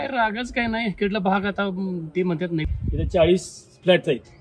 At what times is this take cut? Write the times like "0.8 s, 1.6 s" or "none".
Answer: 2.6 s